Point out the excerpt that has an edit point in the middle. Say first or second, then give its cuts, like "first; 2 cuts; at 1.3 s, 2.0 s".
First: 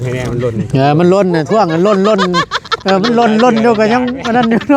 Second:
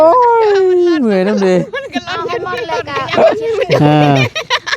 second; 1 cut; at 3.4 s